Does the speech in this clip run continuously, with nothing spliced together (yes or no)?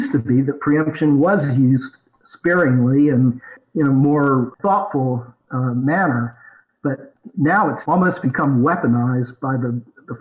no